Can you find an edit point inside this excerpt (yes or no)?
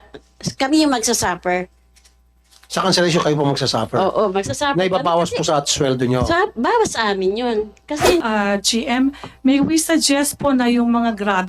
yes